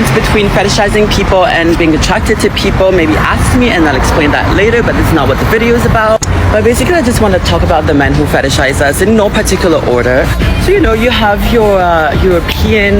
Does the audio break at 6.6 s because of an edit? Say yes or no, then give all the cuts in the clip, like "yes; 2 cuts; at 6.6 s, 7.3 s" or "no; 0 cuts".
no; 0 cuts